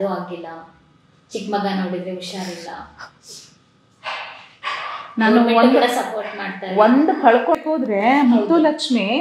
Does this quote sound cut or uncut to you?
cut